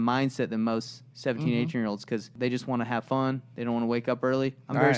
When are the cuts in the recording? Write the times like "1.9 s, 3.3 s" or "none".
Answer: 2.3 s